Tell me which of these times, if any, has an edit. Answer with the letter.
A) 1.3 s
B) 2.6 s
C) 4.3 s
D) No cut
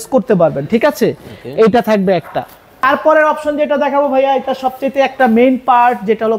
B